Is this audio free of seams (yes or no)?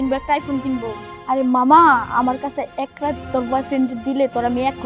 yes